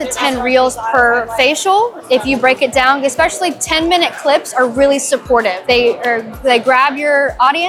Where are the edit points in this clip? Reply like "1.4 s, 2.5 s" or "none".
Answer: none